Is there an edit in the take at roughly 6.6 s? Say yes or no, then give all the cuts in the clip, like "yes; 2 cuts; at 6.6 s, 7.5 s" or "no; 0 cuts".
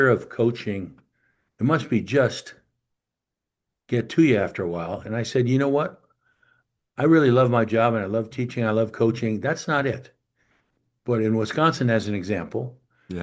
no; 0 cuts